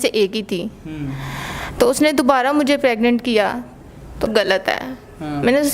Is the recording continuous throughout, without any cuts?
no; 1 cut; at 4.3 s

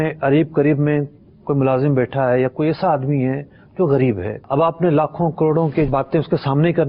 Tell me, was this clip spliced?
yes; 2 cuts; at 4.4 s, 5.9 s

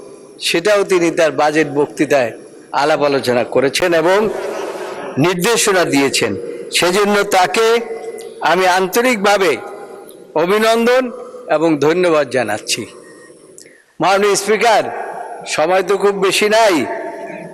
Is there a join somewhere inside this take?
no; 0 cuts

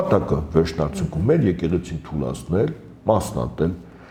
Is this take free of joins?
yes; 0 cuts

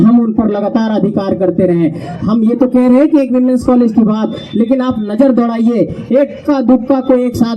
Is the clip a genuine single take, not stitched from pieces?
yes; 0 cuts

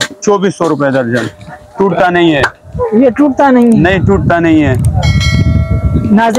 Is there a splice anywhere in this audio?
no; 0 cuts

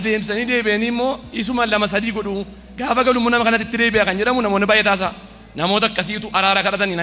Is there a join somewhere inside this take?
no; 0 cuts

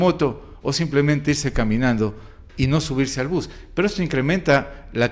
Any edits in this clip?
no; 0 cuts

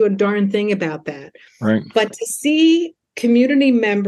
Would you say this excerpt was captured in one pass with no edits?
yes; 0 cuts

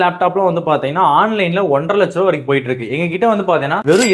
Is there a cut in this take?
no; 0 cuts

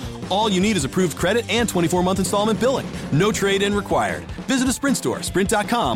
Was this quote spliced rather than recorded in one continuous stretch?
no; 0 cuts

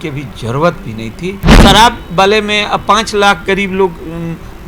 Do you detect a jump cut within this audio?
yes; 1 cut; at 1.5 s

